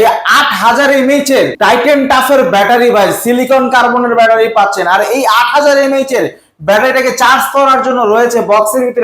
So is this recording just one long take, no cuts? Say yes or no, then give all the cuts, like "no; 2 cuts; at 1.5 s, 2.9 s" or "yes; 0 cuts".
no; 1 cut; at 1.5 s